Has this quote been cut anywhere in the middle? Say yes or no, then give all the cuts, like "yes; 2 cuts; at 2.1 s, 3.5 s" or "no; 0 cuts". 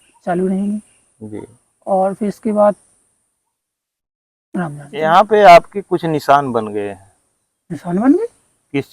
yes; 1 cut; at 4.9 s